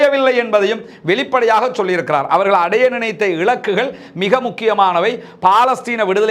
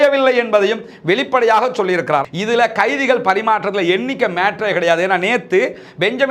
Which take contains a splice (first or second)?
second